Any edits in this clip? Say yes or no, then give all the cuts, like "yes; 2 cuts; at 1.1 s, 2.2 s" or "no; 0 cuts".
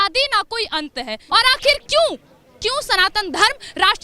yes; 1 cut; at 1.2 s